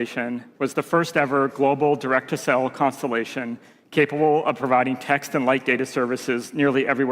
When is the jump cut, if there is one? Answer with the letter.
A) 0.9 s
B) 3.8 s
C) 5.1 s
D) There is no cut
D